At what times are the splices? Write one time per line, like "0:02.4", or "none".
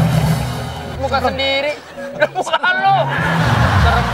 0:00.9